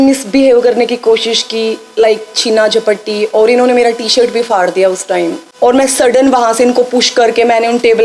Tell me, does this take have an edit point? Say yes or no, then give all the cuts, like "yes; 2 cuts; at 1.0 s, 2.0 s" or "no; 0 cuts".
yes; 1 cut; at 5.4 s